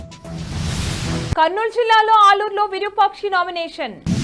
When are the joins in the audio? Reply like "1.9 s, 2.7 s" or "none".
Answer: 1.2 s